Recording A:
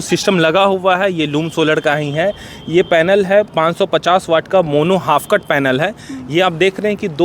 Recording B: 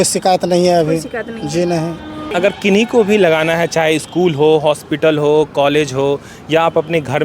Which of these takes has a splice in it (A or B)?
B